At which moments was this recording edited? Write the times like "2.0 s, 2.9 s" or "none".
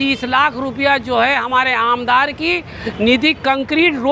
none